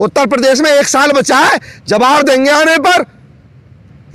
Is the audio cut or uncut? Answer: uncut